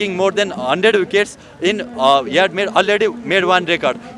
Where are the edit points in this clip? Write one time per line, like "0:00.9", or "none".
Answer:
none